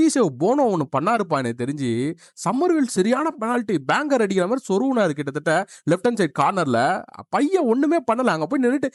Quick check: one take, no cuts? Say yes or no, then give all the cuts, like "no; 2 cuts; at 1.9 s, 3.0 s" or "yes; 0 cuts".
yes; 0 cuts